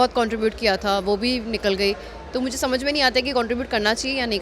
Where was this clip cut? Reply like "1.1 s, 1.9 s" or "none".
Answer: none